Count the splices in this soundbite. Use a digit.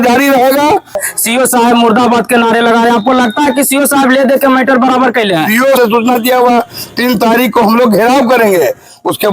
2